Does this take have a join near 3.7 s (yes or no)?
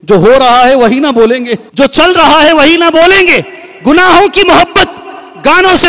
no